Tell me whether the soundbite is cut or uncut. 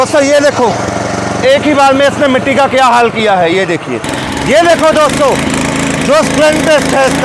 cut